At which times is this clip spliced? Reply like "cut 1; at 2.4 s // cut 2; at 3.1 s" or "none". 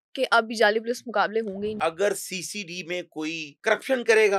cut 1; at 1.8 s // cut 2; at 3.5 s